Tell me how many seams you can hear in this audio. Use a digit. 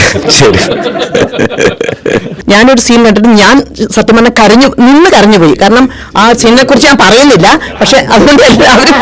1